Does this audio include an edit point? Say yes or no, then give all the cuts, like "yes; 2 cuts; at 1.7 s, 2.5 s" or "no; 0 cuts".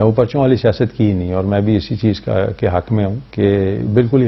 no; 0 cuts